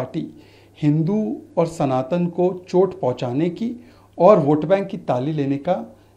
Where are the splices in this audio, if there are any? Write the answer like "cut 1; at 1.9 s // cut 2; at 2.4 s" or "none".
none